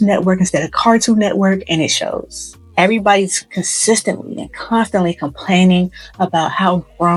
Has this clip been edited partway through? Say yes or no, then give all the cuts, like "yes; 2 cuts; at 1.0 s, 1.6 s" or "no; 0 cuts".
no; 0 cuts